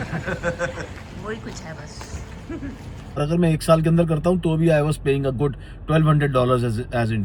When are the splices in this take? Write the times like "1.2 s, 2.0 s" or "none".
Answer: 3.1 s